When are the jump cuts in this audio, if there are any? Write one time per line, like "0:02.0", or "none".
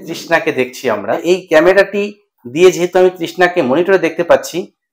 0:01.2